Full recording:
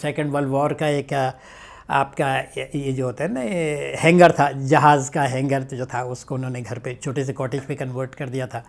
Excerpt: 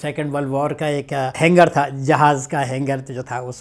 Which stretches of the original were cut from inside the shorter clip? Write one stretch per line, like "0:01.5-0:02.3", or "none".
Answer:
0:01.3-0:04.0